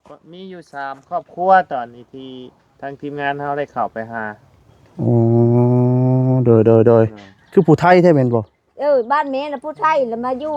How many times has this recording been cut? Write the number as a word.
one